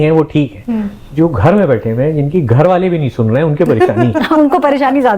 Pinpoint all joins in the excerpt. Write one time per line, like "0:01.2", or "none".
none